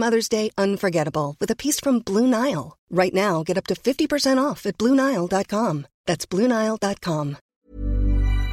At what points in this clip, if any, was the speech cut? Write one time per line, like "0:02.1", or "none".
0:07.5